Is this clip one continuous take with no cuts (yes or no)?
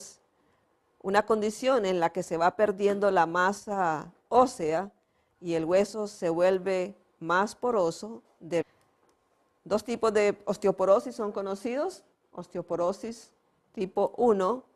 yes